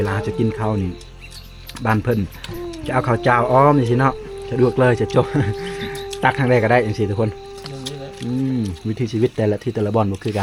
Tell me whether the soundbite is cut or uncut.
uncut